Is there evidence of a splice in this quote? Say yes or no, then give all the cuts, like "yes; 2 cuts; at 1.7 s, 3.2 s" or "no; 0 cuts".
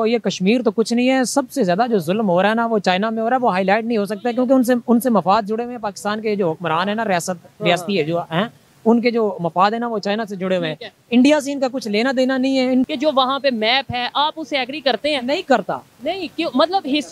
yes; 1 cut; at 12.9 s